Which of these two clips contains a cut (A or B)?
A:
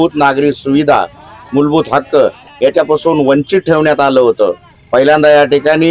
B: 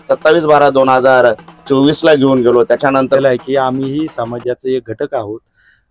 B